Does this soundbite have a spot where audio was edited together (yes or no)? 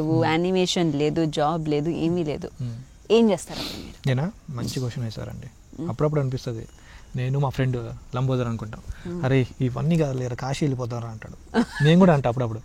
no